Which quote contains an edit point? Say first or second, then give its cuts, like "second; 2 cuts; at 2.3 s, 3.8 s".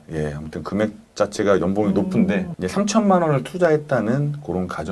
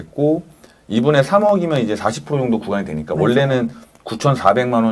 first; 1 cut; at 2.5 s